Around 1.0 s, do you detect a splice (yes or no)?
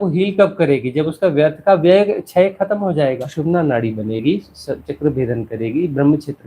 no